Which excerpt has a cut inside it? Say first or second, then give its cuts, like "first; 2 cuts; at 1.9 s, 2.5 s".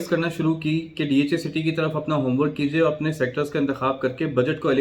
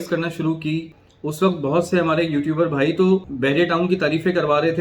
second; 2 cuts; at 0.9 s, 3.3 s